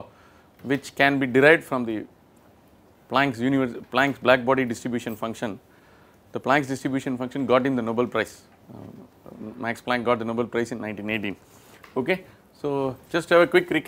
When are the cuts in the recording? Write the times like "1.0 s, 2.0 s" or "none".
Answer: none